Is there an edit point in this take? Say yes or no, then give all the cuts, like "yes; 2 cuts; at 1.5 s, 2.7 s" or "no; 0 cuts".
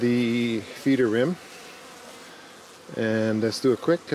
no; 0 cuts